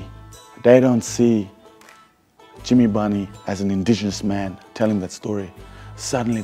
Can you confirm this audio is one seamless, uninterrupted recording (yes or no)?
yes